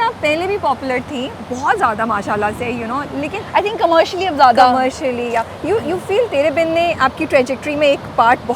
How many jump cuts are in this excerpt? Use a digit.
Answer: 0